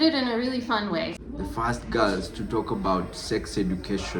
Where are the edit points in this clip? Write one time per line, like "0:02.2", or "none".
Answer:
0:01.2